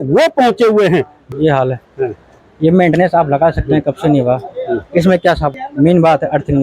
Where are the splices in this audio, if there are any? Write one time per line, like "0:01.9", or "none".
0:01.2
0:05.6